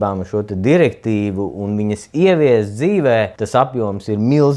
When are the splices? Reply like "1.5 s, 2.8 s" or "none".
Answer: 3.4 s